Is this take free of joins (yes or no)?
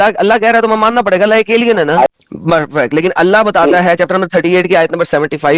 no